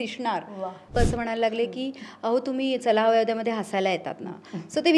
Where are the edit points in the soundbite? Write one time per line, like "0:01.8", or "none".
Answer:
0:00.9